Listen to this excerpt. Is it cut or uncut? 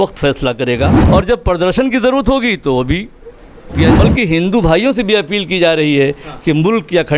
cut